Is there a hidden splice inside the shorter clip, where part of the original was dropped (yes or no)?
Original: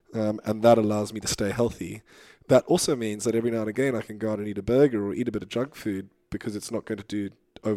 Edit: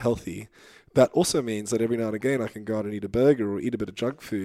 no